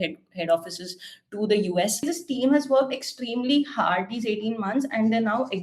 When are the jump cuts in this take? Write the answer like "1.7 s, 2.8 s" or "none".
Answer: 2.0 s